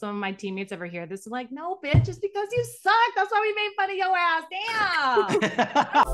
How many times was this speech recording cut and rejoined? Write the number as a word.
zero